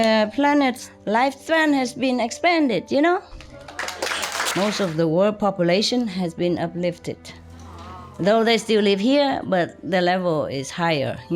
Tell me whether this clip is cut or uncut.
cut